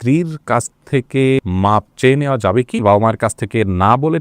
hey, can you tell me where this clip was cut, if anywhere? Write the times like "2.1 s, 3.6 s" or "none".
1.4 s, 2.8 s